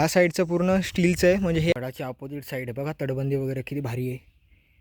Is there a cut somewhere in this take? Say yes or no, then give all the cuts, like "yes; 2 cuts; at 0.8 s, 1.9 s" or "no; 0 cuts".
yes; 1 cut; at 1.7 s